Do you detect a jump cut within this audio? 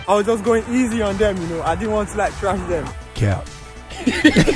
no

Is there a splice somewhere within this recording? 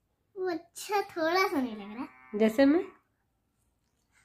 no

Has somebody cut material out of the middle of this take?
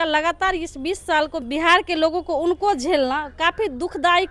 yes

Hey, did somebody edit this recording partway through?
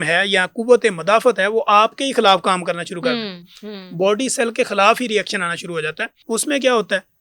yes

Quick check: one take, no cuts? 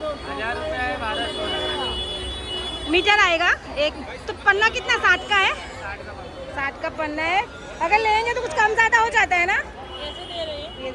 yes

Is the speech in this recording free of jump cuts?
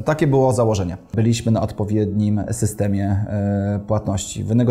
no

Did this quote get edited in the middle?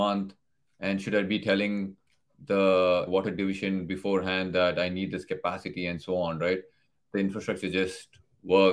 yes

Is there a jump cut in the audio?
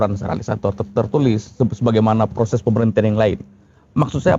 no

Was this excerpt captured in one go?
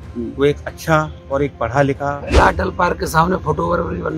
no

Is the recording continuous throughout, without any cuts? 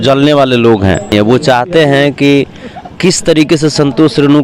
no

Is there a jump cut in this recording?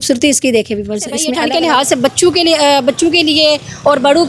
yes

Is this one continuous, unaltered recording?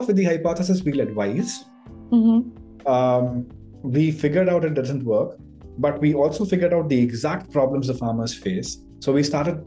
yes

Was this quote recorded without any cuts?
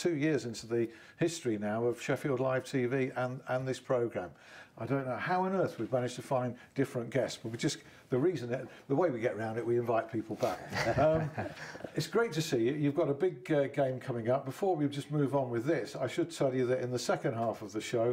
no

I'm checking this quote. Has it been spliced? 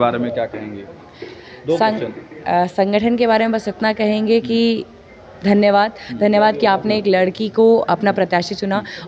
no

